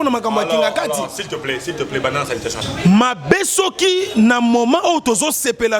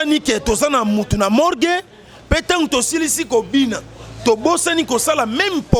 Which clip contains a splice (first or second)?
first